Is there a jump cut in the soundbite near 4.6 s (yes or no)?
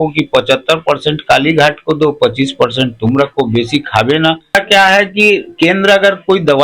yes